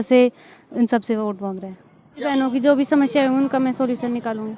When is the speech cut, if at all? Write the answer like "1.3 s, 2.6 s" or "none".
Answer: 2.3 s